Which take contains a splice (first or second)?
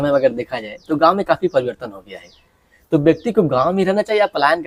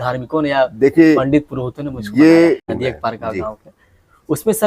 second